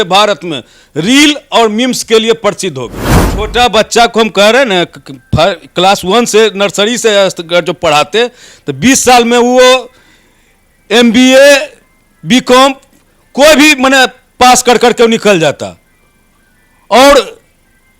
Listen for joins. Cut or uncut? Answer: cut